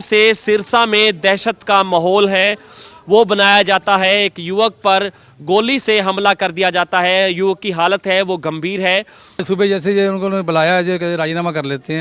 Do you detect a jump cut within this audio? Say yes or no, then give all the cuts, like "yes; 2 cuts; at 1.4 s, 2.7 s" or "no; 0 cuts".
yes; 1 cut; at 9.4 s